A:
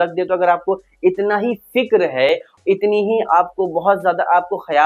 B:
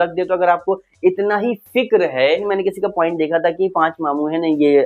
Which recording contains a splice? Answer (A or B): B